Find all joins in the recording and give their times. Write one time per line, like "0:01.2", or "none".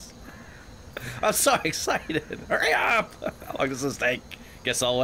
none